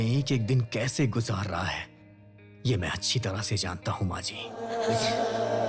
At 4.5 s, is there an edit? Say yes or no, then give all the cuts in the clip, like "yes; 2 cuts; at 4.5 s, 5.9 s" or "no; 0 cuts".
yes; 1 cut; at 4.5 s